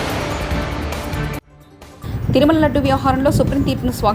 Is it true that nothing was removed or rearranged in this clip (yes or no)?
yes